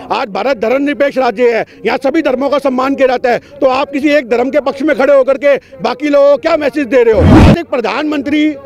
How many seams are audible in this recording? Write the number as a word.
one